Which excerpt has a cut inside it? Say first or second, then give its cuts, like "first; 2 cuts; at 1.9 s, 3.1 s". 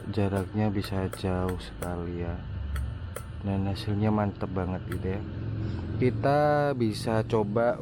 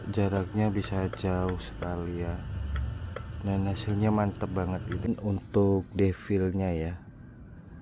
second; 1 cut; at 5.1 s